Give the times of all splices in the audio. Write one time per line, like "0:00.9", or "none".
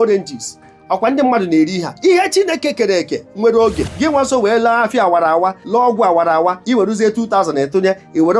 0:03.9
0:05.6
0:06.6

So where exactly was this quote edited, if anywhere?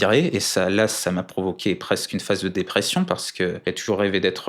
0:03.6

